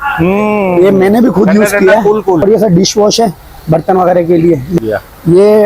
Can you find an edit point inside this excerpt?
yes; 2 cuts; at 2.4 s, 4.8 s

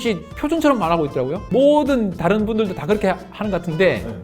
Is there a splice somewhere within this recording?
yes; 1 cut; at 1.5 s

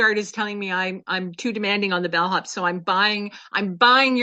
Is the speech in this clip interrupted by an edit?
no; 0 cuts

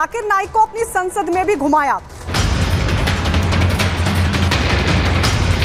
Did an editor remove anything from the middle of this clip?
yes; 1 cut; at 2.2 s

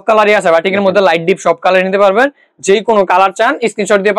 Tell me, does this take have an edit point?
no; 0 cuts

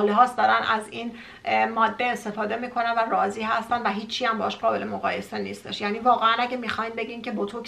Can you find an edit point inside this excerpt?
no; 0 cuts

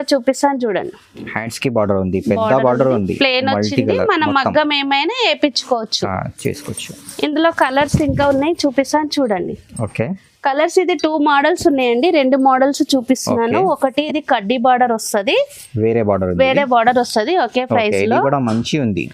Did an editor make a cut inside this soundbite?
no; 0 cuts

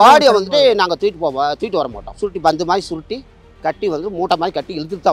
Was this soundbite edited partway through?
yes; 1 cut; at 2.0 s

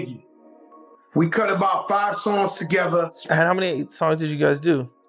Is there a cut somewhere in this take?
yes; 1 cut; at 3.2 s

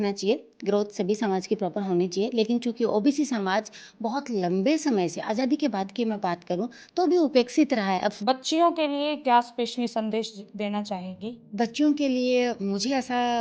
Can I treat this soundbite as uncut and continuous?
no; 2 cuts; at 8.1 s, 11.4 s

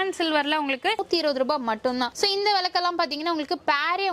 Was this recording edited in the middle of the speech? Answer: yes; 1 cut; at 1.0 s

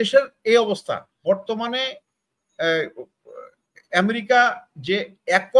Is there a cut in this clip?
yes; 1 cut; at 1.1 s

